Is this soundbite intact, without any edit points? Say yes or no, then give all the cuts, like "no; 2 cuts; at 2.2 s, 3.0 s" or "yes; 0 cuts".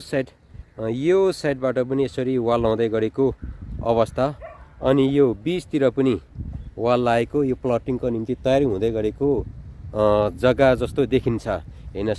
yes; 0 cuts